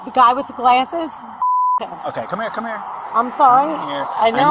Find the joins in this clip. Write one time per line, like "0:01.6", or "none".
none